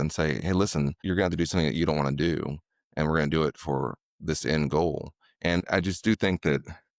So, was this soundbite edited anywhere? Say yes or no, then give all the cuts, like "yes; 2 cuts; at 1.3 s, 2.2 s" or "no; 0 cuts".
yes; 2 cuts; at 1.0 s, 5.6 s